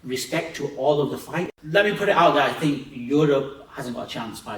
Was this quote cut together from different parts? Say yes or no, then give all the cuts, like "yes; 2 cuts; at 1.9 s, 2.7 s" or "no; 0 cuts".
yes; 1 cut; at 1.5 s